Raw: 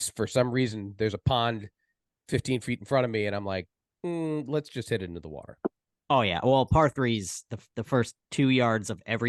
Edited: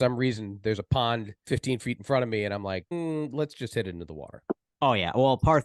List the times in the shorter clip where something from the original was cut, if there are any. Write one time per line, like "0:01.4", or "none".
0:01.3
0:02.9
0:04.7